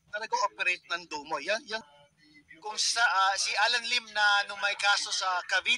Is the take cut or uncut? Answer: cut